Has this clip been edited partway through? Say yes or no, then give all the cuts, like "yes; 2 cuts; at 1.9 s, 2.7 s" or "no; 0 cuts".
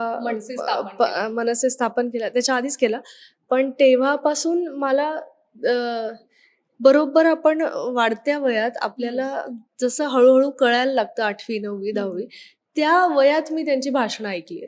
no; 0 cuts